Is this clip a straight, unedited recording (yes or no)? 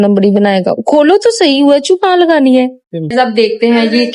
no